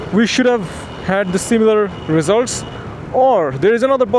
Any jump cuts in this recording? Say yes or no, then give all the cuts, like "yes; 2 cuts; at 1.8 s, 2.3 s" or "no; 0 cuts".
no; 0 cuts